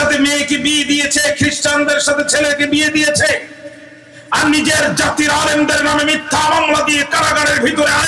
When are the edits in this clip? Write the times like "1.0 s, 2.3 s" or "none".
none